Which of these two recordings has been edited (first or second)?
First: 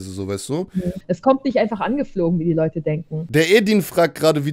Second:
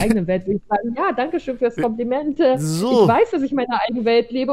first